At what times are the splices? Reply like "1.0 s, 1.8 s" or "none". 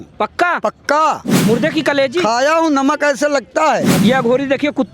1.3 s, 3.9 s